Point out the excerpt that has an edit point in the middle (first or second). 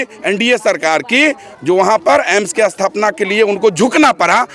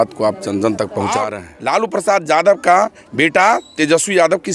second